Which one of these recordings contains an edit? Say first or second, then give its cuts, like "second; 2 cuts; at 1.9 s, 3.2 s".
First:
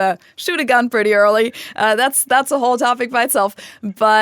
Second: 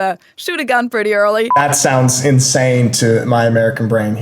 second; 1 cut; at 1.6 s